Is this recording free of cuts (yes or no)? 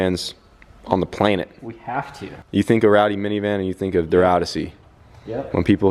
no